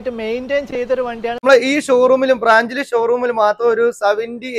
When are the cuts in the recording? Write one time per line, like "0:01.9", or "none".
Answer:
0:01.4